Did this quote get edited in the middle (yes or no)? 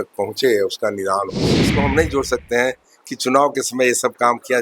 yes